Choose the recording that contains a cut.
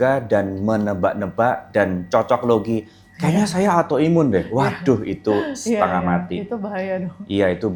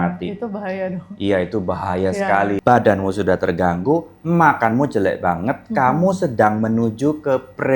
second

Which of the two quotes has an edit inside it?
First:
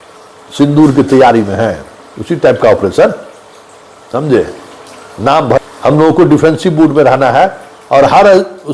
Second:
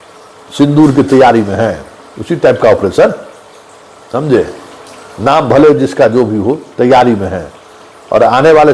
first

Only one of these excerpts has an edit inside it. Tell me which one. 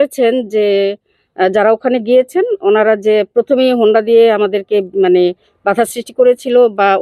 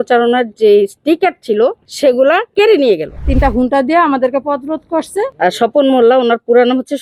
second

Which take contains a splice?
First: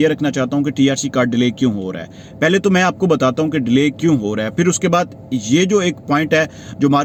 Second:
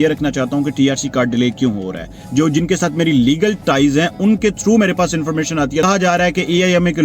second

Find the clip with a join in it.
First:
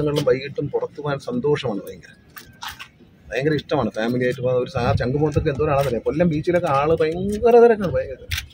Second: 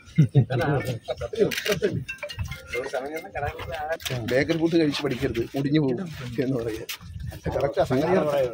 second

